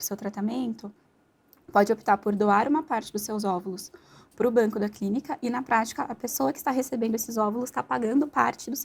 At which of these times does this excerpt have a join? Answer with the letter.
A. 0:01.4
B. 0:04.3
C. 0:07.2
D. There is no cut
D